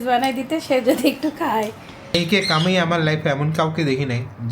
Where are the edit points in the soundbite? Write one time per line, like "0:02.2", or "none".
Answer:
0:02.1